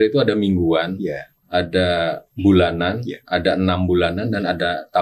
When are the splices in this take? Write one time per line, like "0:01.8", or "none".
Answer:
0:01.3

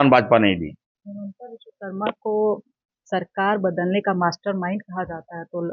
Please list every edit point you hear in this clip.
none

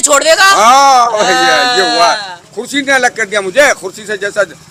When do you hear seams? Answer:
none

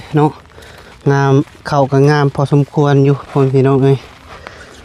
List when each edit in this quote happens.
none

